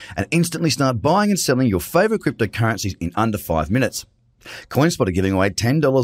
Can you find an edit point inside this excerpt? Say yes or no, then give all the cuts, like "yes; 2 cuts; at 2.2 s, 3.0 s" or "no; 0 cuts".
no; 0 cuts